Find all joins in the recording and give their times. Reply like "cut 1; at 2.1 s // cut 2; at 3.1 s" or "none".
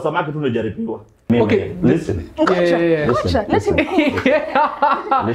cut 1; at 1.3 s